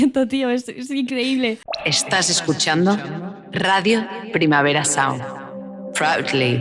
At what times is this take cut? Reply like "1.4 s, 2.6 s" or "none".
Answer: 1.7 s